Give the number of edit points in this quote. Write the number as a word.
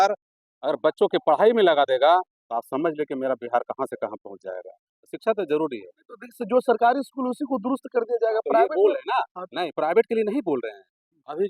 zero